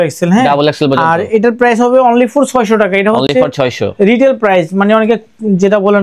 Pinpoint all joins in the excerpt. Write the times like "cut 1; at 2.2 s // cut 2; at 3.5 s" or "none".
none

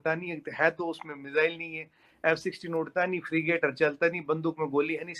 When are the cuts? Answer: none

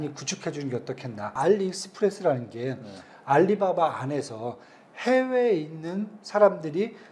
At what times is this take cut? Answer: cut 1; at 1.4 s

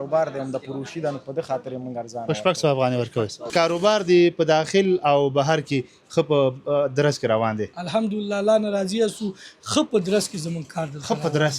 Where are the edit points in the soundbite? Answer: cut 1; at 3.5 s

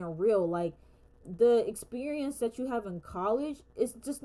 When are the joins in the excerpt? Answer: none

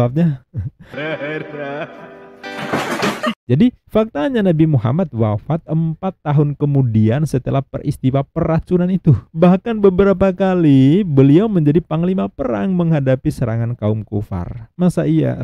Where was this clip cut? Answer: cut 1; at 3.4 s

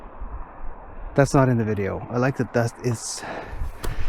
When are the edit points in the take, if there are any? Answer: none

